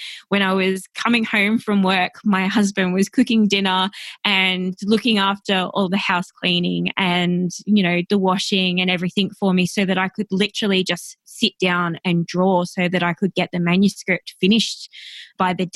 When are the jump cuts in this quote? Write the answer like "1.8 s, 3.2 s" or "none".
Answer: none